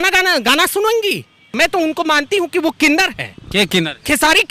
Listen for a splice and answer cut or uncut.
cut